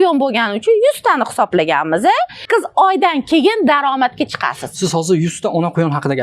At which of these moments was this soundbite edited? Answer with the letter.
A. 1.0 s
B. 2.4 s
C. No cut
B